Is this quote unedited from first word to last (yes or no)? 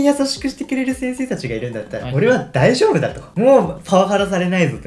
yes